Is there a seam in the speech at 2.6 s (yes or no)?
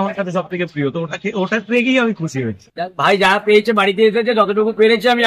yes